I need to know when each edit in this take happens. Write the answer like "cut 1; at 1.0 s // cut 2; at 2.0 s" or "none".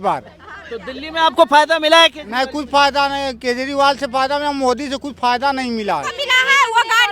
cut 1; at 6.2 s